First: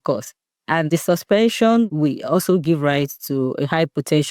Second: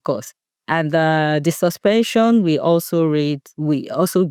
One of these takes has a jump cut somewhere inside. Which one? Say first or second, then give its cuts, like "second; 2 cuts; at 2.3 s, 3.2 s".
first; 2 cuts; at 0.9 s, 1.9 s